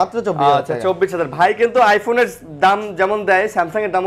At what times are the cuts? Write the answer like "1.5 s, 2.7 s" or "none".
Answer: none